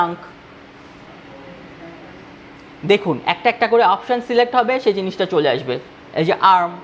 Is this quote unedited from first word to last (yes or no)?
no